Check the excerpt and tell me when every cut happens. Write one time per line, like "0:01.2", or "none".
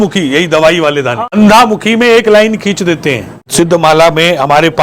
0:01.2
0:03.4